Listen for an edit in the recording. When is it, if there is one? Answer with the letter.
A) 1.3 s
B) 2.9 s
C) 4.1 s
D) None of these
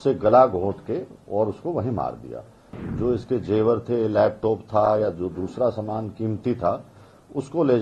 B